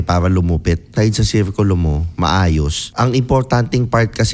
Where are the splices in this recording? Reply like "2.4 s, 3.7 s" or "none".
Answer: 0.9 s, 2.8 s